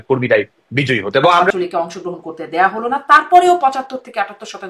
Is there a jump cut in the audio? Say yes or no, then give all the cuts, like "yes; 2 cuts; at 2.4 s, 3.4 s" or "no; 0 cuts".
yes; 1 cut; at 1.5 s